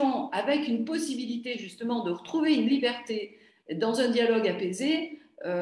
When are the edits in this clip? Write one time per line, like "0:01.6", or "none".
none